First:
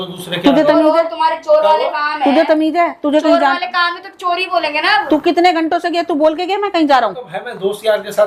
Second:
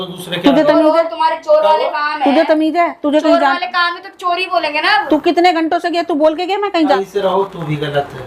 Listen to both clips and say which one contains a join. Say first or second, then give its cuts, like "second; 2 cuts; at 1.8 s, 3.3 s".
second; 1 cut; at 6.9 s